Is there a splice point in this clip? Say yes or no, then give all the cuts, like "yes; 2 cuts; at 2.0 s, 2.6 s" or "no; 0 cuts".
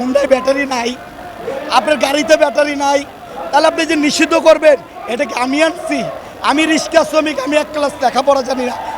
no; 0 cuts